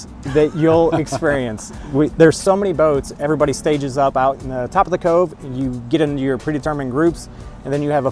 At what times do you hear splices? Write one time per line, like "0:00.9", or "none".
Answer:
none